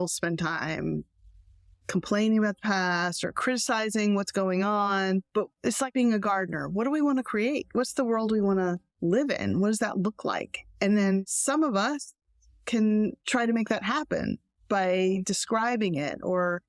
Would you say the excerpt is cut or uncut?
uncut